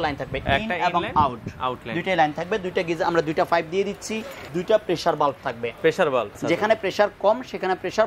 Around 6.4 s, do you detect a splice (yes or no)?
yes